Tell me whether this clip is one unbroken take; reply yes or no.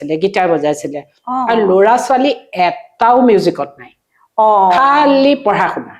yes